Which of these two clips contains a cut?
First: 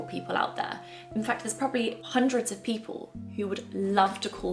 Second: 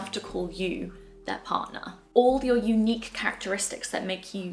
first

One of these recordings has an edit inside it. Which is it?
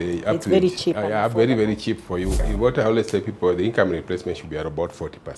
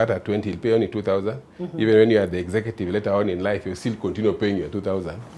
first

